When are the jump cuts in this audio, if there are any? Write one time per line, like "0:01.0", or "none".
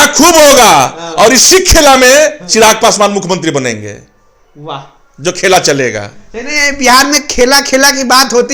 none